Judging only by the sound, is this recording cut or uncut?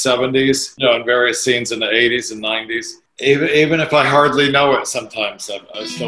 uncut